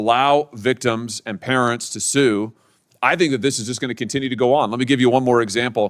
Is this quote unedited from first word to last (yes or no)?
yes